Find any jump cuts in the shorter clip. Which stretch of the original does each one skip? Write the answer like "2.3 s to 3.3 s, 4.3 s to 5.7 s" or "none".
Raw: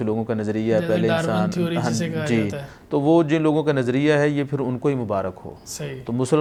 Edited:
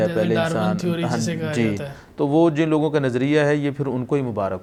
none